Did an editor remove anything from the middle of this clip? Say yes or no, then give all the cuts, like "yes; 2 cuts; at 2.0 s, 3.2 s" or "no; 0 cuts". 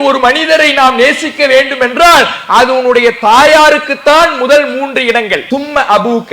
yes; 1 cut; at 5.4 s